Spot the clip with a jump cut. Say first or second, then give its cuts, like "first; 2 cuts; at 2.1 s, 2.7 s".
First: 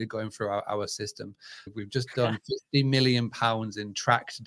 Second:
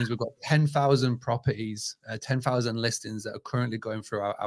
first; 1 cut; at 1.7 s